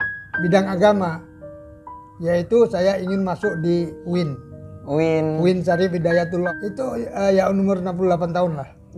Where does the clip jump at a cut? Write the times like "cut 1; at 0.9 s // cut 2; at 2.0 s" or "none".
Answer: cut 1; at 6.5 s